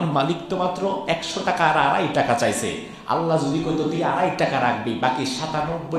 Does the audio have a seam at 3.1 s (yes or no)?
no